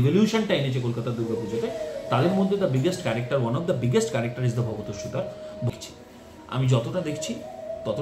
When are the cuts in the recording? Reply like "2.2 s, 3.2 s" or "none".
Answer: 5.7 s